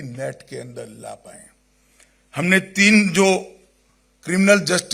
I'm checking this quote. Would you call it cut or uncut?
uncut